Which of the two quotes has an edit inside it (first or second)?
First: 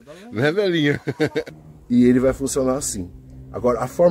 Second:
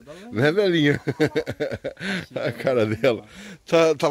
first